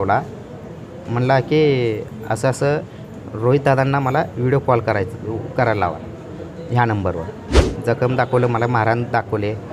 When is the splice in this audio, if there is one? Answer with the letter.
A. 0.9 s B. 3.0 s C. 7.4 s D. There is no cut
C